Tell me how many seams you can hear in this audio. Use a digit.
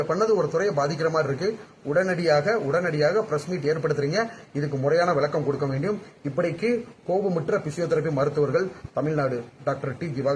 0